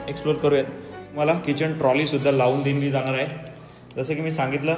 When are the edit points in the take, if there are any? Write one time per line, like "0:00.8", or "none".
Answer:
0:01.1